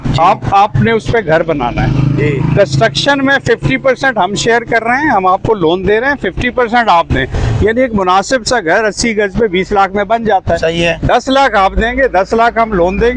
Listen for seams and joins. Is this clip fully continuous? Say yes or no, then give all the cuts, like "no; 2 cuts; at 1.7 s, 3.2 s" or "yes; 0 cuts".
yes; 0 cuts